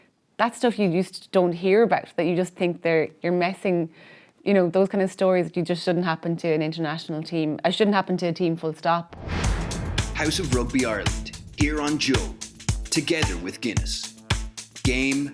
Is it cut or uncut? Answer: cut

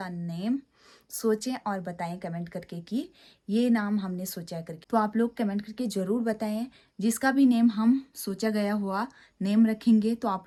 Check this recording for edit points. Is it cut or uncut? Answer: uncut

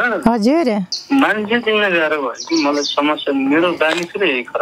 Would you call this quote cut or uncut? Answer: cut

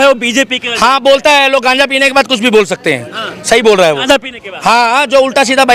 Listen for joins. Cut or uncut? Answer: uncut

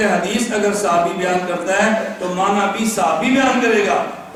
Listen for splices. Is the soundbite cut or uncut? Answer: uncut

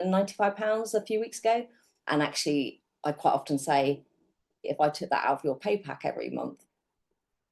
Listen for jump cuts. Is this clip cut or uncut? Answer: cut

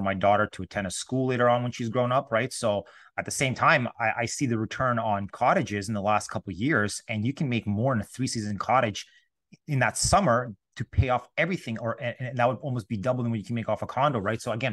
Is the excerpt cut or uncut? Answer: uncut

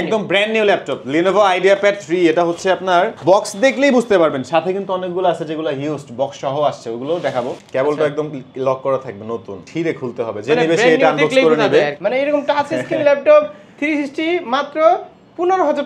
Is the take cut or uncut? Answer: cut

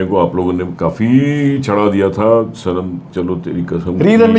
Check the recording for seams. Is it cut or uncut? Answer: uncut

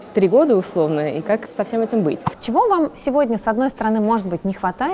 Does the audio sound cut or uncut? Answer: cut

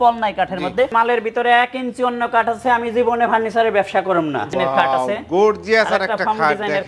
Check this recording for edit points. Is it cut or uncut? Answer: cut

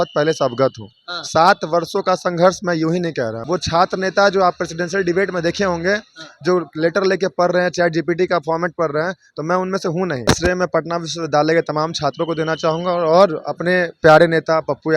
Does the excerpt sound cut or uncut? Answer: cut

